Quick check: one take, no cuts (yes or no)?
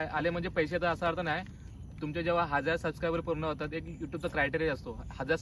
yes